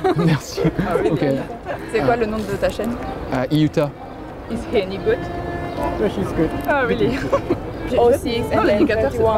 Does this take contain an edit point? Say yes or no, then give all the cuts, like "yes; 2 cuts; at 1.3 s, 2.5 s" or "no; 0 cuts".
yes; 1 cut; at 7.8 s